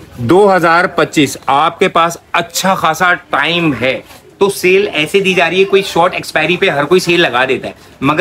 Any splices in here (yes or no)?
no